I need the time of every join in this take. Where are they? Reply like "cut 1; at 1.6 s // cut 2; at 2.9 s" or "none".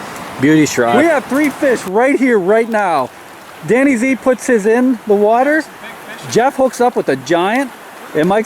cut 1; at 0.9 s